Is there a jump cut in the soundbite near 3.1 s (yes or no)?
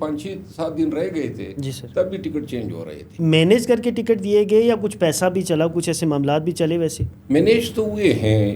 yes